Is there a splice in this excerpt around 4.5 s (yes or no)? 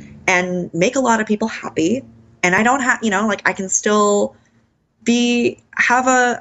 no